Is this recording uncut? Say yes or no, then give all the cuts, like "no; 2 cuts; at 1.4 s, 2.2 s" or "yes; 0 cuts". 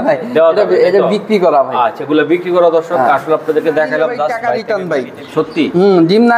no; 1 cut; at 4.3 s